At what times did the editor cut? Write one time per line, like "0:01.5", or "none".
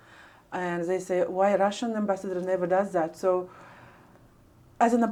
none